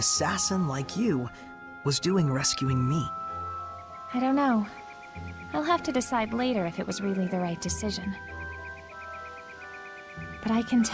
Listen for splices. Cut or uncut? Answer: uncut